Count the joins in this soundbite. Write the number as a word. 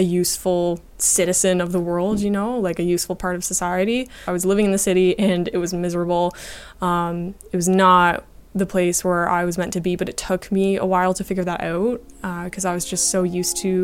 two